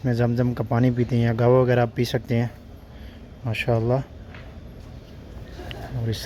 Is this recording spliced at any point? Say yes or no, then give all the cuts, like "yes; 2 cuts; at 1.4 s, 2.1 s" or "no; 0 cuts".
no; 0 cuts